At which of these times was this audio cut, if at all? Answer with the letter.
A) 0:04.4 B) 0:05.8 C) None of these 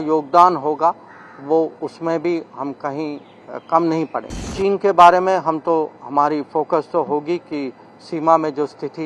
A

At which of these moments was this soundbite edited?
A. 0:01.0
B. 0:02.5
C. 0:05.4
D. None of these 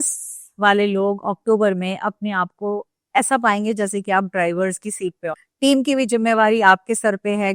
C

